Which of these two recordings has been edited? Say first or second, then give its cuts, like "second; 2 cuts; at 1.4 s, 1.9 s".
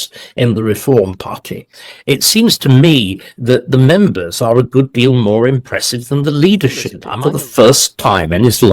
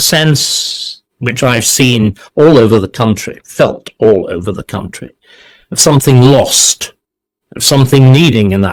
first; 1 cut; at 7.0 s